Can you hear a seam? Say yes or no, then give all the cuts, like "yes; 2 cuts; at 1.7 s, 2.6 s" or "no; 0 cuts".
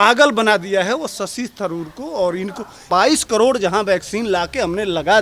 yes; 1 cut; at 2.9 s